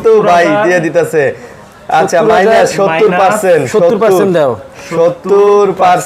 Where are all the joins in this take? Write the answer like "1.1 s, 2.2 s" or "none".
none